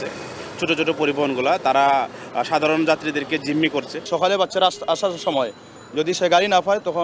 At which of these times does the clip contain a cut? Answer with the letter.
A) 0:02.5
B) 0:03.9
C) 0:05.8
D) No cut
D